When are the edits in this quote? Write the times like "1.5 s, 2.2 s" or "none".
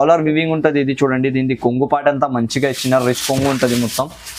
none